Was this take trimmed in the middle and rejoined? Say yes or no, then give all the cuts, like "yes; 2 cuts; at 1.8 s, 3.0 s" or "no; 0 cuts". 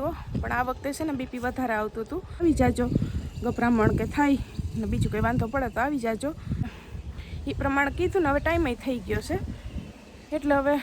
yes; 2 cuts; at 2.4 s, 6.8 s